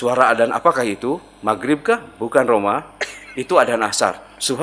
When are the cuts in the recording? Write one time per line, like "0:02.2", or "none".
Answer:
none